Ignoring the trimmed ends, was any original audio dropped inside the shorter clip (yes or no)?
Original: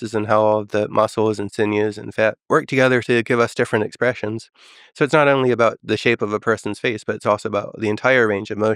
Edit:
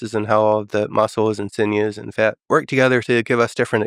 no